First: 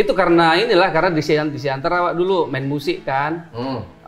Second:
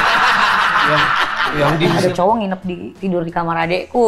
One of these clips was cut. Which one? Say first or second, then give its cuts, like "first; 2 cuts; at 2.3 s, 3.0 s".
second; 1 cut; at 1.9 s